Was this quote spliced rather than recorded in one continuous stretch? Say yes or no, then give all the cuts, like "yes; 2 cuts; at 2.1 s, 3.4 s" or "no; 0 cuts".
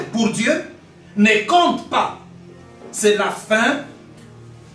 no; 0 cuts